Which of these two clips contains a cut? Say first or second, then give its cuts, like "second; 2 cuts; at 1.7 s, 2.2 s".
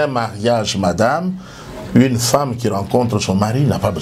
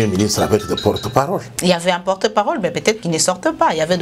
second; 1 cut; at 1.5 s